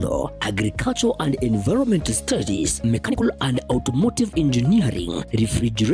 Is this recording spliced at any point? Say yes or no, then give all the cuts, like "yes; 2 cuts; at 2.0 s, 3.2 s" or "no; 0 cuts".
yes; 1 cut; at 3.1 s